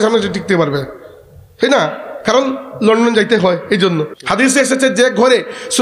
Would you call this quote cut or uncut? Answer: cut